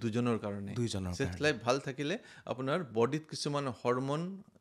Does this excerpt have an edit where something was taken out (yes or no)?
no